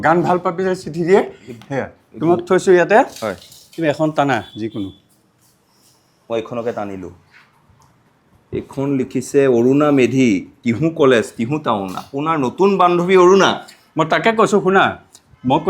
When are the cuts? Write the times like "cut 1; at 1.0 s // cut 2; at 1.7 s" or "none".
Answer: none